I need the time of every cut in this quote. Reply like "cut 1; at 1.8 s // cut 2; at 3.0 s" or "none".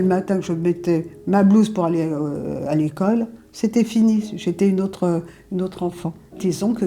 none